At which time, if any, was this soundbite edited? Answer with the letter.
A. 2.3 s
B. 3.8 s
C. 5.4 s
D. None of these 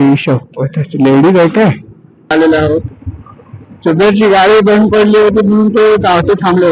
A